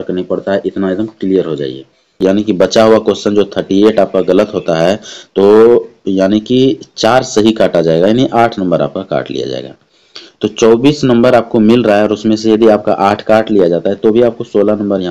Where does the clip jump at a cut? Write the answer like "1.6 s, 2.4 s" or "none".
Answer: 2.2 s